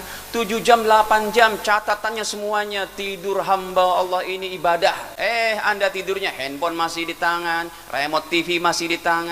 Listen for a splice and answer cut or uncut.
cut